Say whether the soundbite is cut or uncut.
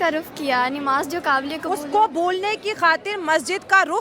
uncut